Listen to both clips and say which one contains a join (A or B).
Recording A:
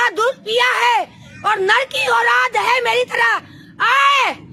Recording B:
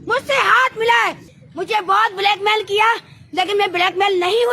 B